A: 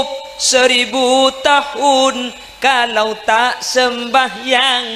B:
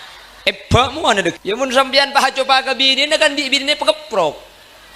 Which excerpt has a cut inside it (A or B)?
B